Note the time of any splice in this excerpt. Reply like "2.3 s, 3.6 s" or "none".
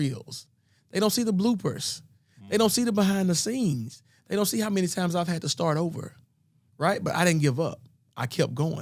none